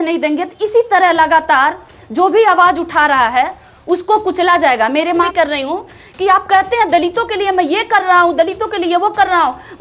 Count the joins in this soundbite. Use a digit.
1